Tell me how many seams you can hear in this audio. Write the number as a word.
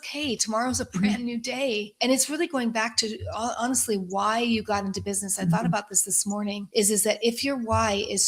two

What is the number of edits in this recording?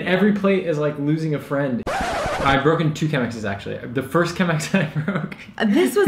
one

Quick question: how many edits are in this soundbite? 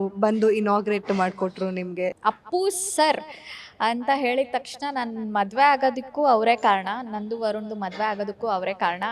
one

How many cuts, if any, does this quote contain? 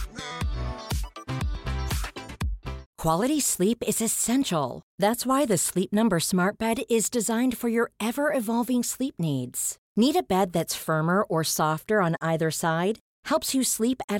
one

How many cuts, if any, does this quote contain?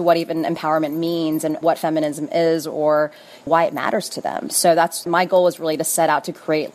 two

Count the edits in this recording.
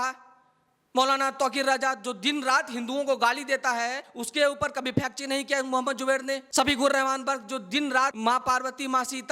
three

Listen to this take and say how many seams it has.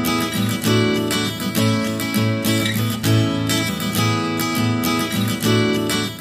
one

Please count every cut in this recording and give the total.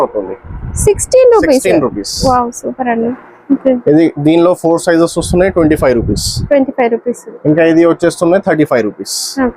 one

